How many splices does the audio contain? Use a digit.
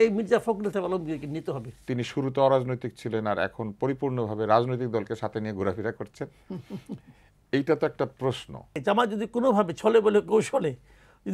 2